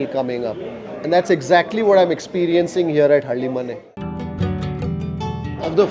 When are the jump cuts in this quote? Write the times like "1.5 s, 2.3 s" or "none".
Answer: 3.8 s